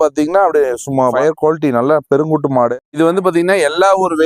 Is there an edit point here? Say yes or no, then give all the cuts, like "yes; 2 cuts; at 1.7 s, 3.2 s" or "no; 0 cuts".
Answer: yes; 2 cuts; at 1.2 s, 2.9 s